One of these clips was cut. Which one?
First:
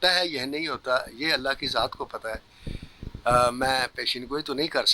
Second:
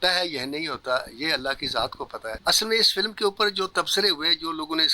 second; 1 cut; at 2.4 s

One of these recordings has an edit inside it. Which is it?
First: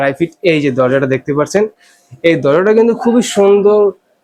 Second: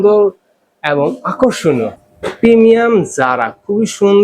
second; 1 cut; at 1.9 s

